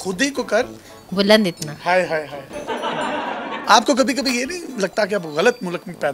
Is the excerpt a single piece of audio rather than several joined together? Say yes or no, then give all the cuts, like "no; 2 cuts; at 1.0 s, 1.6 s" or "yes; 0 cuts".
no; 2 cuts; at 2.4 s, 3.6 s